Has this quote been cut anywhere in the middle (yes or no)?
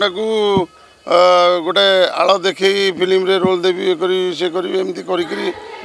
no